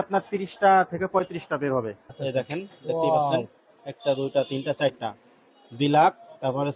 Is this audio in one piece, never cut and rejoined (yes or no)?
no